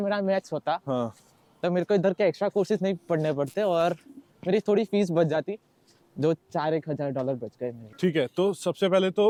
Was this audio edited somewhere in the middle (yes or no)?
no